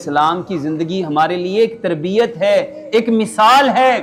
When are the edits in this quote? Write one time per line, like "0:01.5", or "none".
none